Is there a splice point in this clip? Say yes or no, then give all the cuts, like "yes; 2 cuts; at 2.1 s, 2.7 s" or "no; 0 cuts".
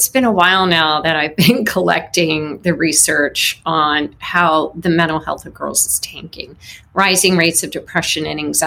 no; 0 cuts